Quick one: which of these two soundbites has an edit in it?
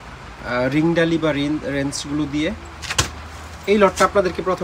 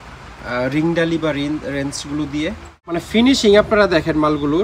second; 1 cut; at 2.7 s

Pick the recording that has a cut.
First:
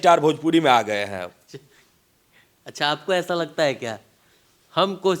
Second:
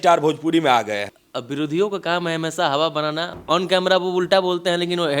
second; 2 cuts; at 1.2 s, 3.3 s

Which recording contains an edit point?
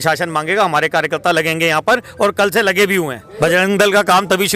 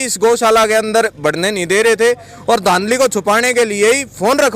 first; 1 cut; at 3.2 s

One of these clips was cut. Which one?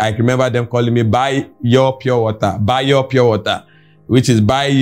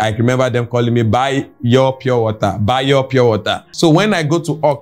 second; 1 cut; at 3.6 s

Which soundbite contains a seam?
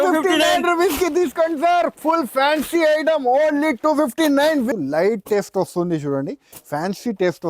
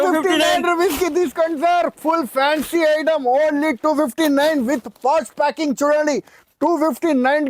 first; 1 cut; at 4.7 s

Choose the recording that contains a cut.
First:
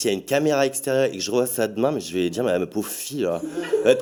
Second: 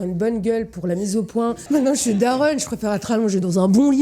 second; 1 cut; at 1.6 s

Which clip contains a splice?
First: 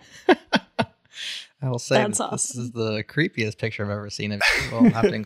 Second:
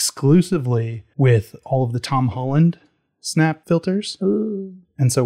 second; 2 cuts; at 1.0 s, 3.6 s

